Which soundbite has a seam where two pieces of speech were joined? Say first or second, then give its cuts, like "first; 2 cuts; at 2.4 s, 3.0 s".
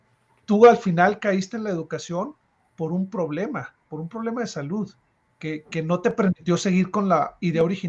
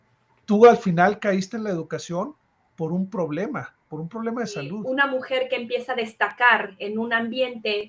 second; 1 cut; at 4.8 s